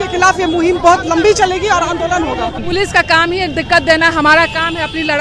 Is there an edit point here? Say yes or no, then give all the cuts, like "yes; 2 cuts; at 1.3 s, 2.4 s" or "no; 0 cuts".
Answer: yes; 1 cut; at 2.6 s